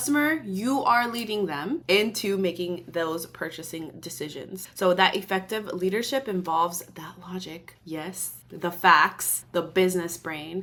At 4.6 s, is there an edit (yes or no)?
no